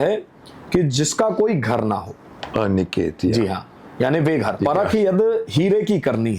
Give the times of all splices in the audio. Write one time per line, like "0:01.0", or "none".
0:04.6